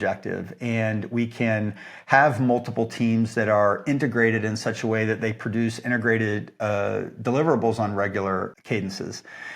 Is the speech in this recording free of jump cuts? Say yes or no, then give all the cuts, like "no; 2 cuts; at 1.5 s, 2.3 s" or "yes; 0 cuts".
no; 1 cut; at 8.6 s